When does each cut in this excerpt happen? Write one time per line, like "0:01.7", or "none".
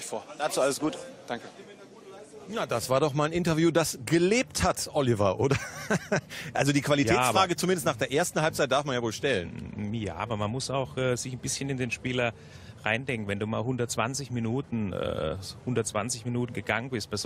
none